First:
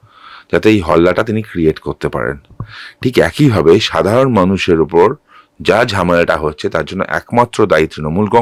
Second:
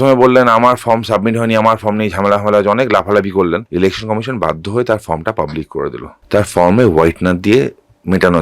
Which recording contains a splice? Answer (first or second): second